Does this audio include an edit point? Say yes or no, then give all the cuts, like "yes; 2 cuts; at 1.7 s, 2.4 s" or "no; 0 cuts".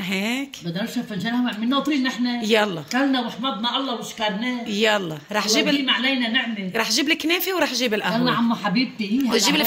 no; 0 cuts